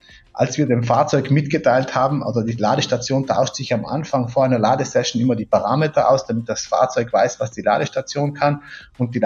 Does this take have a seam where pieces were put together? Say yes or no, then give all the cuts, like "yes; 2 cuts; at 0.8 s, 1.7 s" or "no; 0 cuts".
yes; 1 cut; at 4.3 s